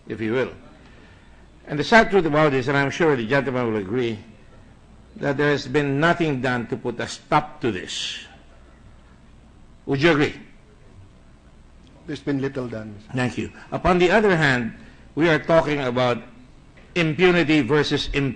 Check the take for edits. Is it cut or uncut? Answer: cut